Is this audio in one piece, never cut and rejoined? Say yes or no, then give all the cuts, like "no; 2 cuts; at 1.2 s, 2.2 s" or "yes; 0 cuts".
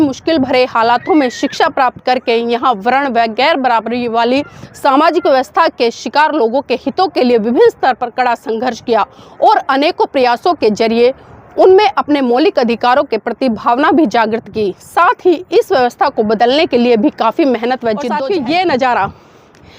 no; 1 cut; at 18.1 s